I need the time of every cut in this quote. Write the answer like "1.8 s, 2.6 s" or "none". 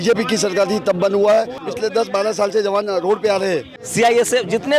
1.6 s, 3.8 s